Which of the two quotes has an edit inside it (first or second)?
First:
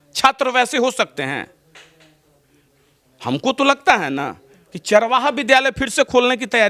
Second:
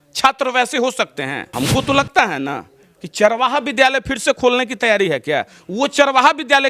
second